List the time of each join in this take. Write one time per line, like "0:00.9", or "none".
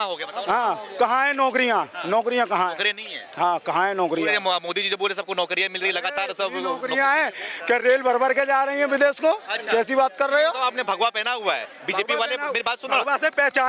none